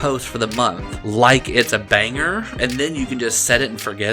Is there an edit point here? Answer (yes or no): yes